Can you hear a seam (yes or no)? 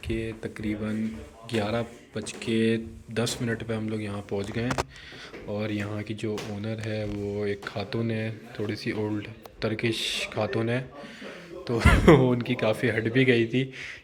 no